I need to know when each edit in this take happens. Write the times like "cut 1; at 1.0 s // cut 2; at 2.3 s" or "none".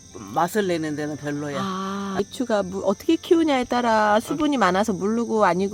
none